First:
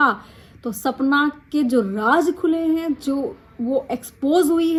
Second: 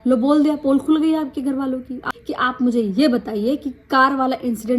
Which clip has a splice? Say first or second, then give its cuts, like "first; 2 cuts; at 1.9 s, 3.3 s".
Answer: second; 1 cut; at 2.1 s